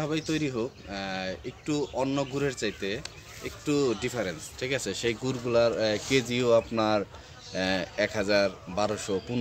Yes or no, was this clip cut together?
no